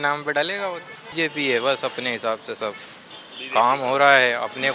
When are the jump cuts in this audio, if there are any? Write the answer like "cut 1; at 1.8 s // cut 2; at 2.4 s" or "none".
cut 1; at 1.2 s